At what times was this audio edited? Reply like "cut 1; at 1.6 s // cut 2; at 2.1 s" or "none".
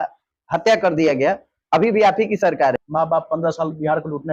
cut 1; at 2.8 s

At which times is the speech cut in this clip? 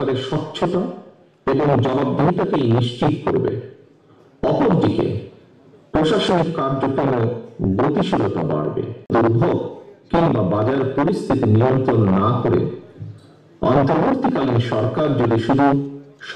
cut 1; at 9.0 s

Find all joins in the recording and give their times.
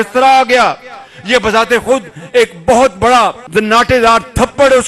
cut 1; at 3.4 s

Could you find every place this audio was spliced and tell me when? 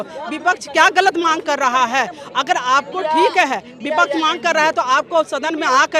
none

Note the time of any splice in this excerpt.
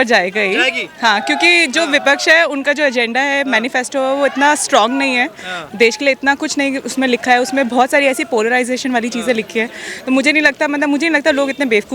none

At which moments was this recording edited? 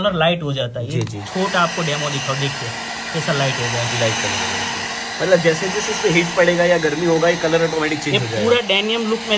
none

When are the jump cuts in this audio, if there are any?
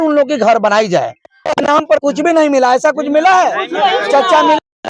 cut 1; at 1.3 s

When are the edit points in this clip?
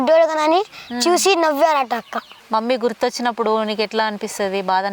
cut 1; at 2.3 s

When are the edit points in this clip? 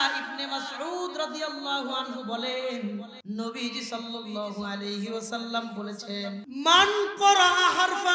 cut 1; at 3.1 s // cut 2; at 6.5 s

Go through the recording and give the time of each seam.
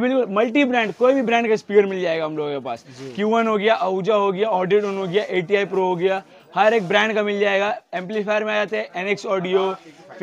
none

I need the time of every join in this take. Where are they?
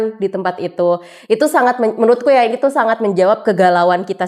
none

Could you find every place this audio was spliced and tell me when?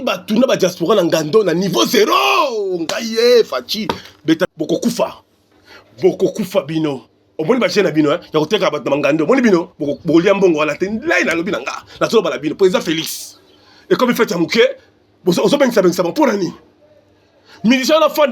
cut 1; at 4.5 s

